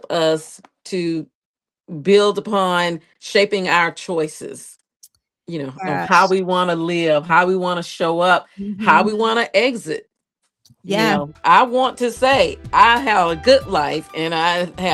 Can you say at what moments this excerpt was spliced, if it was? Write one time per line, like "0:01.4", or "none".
none

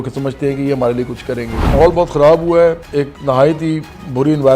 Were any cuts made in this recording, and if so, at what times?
0:01.7
0:02.8

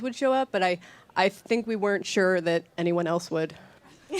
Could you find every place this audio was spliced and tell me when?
0:01.1

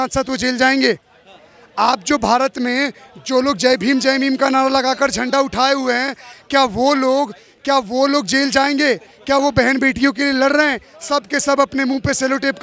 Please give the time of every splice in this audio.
none

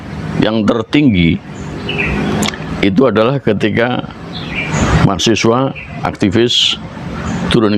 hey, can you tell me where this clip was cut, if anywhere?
none

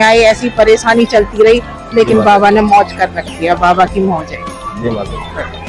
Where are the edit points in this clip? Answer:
none

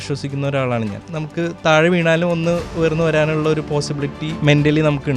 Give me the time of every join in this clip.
0:01.0
0:02.7
0:04.3

